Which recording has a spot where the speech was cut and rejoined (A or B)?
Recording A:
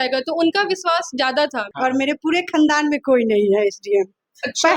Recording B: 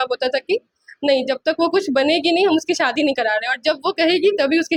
A